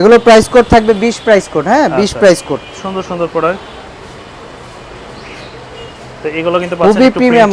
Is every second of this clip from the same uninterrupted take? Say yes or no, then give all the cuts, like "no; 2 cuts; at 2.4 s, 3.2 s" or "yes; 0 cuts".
yes; 0 cuts